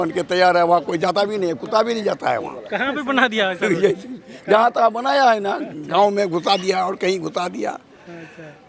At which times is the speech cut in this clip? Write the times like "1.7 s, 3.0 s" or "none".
none